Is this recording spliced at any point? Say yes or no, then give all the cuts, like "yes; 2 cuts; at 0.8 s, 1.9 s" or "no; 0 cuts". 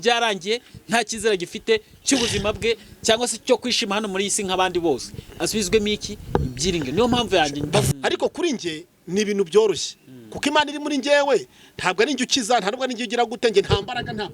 yes; 1 cut; at 7.9 s